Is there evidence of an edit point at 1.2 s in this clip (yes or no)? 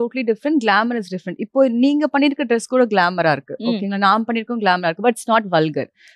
no